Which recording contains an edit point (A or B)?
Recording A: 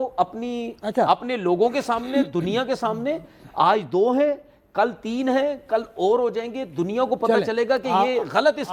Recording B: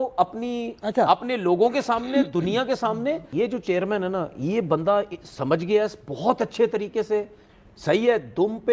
B